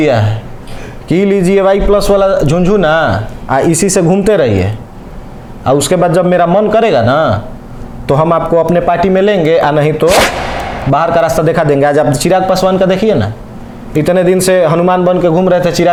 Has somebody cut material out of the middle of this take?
no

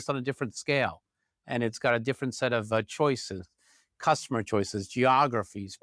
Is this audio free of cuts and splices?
yes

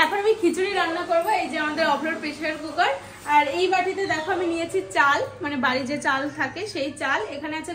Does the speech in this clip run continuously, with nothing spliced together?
yes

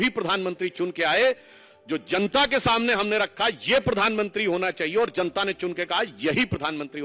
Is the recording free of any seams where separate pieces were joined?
yes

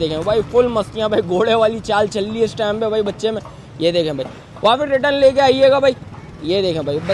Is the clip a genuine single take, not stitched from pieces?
yes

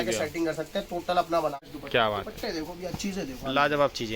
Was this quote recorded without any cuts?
no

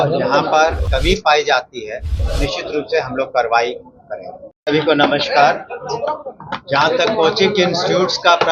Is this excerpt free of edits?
no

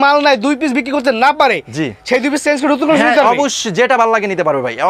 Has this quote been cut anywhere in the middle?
no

